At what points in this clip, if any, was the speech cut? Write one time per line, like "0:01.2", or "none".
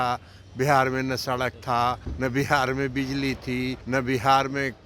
0:02.1
0:03.8